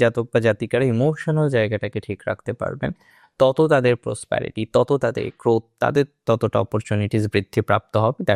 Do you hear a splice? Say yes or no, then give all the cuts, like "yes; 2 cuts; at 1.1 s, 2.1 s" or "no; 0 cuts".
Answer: no; 0 cuts